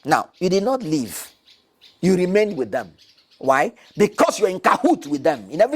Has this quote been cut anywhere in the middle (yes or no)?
no